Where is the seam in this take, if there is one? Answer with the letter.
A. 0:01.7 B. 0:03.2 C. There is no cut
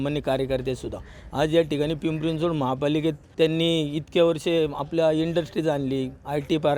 B